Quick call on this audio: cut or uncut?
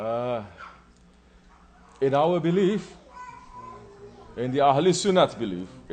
cut